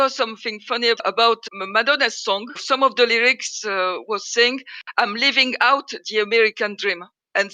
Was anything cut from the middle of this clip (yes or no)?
no